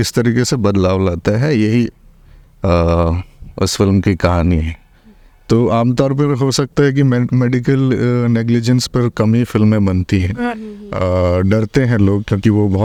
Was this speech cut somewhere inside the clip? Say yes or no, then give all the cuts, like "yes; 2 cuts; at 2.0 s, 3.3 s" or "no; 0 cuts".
no; 0 cuts